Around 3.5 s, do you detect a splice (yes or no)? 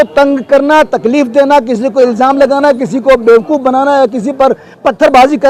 no